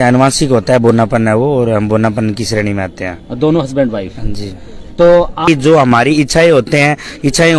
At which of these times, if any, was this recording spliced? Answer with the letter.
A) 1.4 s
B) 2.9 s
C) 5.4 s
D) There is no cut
C